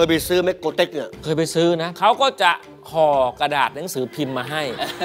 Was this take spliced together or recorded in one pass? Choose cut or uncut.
cut